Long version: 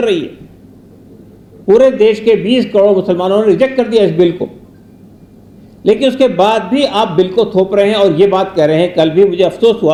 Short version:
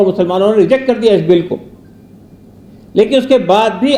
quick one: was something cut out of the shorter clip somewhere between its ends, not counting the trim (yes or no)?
no